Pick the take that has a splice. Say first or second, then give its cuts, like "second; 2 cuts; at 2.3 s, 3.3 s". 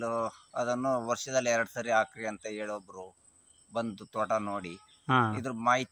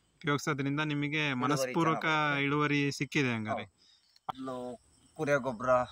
second; 1 cut; at 4.3 s